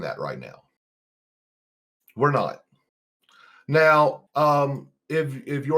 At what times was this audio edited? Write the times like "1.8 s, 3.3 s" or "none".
4.2 s

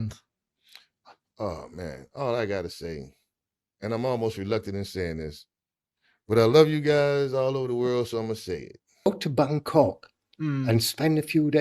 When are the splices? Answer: 9.1 s

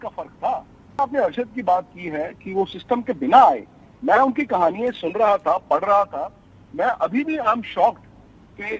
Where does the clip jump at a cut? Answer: 1.0 s

